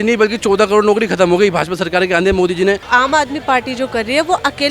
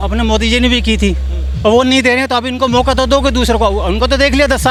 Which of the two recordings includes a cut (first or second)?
first